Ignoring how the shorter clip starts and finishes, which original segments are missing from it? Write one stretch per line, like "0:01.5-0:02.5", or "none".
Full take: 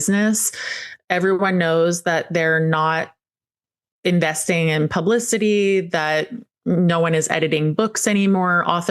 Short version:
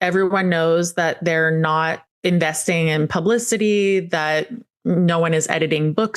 0:03.1-0:03.9